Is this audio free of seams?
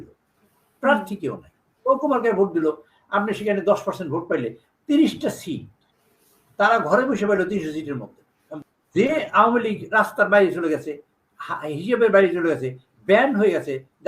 no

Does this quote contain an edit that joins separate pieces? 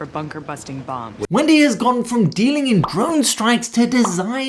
no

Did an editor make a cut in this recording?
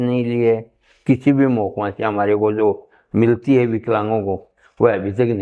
no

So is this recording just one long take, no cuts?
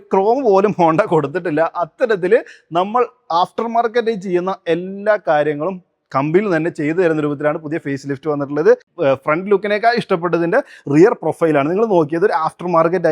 no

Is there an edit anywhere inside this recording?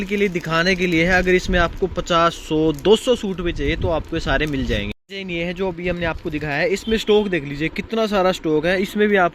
yes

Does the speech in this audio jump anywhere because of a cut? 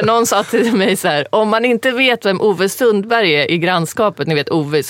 no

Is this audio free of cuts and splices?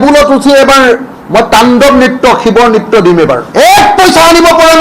no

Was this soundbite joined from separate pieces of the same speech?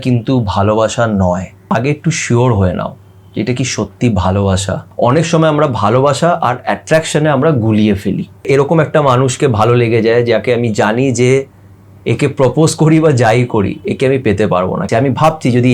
yes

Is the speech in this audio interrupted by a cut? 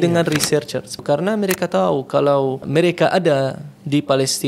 yes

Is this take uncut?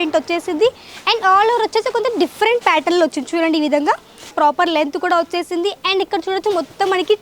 no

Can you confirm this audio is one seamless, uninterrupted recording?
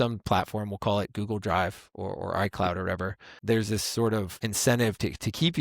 no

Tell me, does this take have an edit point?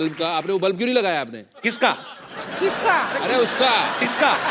no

